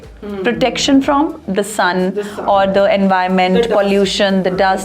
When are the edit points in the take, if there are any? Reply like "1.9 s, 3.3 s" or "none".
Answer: none